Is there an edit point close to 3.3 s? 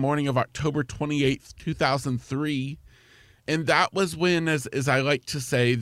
yes; 1 cut; at 3.3 s

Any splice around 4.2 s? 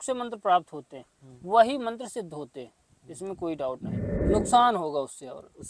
yes; 1 cut; at 4.2 s

